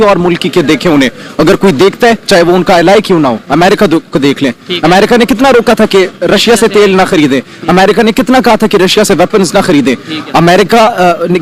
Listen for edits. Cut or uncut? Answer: uncut